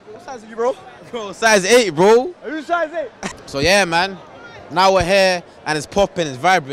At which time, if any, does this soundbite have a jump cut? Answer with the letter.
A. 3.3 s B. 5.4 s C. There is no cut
C